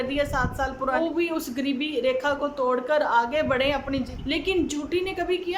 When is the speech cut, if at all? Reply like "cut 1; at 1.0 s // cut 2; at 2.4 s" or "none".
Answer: cut 1; at 1.0 s // cut 2; at 4.1 s